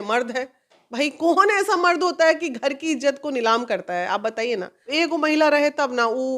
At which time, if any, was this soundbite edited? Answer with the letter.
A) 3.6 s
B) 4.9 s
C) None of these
B